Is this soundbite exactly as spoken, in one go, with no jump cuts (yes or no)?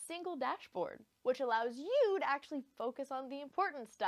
yes